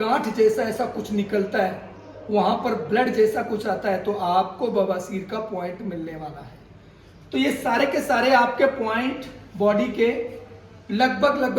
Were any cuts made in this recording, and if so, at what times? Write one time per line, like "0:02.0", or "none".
none

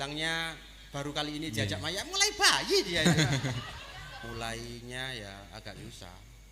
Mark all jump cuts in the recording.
0:04.2

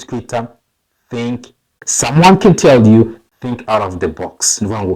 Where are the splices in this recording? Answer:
0:01.8

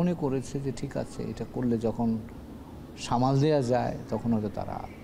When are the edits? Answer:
none

